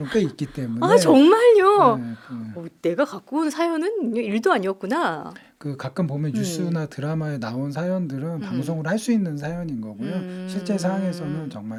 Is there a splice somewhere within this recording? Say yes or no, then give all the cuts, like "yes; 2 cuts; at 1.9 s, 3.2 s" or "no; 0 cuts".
no; 0 cuts